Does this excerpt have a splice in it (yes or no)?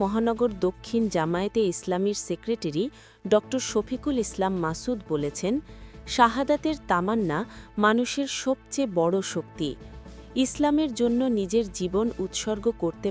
no